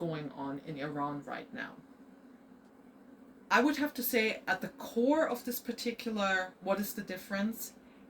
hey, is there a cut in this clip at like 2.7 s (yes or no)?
yes